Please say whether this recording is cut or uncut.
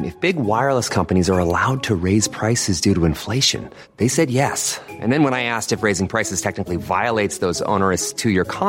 uncut